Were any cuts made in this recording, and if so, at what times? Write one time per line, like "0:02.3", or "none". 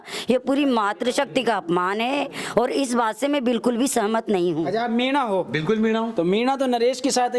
0:04.7

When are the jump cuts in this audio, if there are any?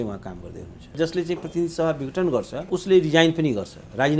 0:00.9
0:02.6

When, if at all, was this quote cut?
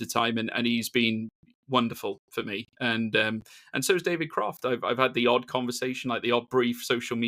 none

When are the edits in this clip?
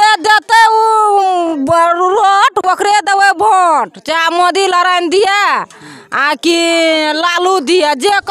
none

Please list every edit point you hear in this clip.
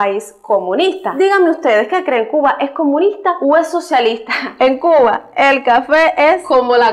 0:01.1
0:04.4

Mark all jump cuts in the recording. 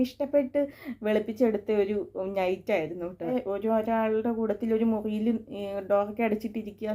0:03.3

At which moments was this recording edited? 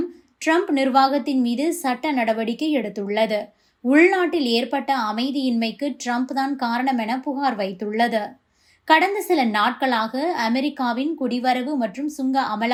none

